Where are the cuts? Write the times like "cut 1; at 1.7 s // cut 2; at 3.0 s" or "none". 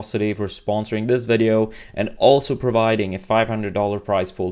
none